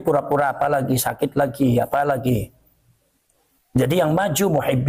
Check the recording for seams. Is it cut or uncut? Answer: uncut